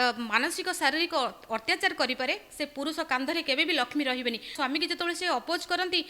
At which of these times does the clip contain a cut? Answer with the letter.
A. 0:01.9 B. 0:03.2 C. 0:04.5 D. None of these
C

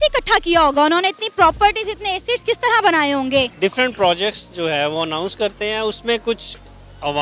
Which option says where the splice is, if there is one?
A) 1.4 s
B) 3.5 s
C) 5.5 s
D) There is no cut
B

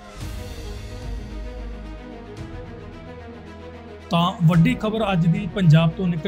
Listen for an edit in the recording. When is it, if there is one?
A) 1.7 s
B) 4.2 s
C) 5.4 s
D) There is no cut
A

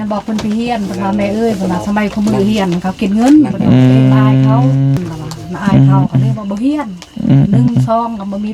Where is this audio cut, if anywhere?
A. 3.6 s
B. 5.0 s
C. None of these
B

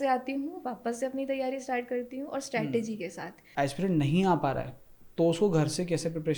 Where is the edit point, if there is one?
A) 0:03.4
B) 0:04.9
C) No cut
A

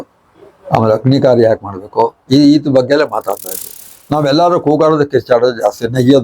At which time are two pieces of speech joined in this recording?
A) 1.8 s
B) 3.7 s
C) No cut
B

